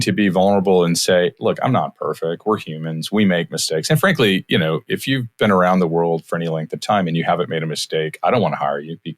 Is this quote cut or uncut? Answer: uncut